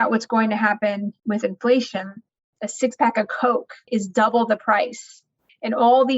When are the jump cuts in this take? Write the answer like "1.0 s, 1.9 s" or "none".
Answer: 1.1 s, 2.4 s, 3.9 s